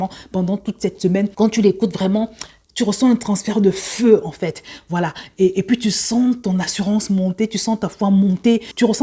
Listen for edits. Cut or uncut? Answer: cut